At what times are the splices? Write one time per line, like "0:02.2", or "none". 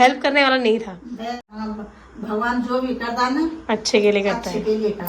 0:01.5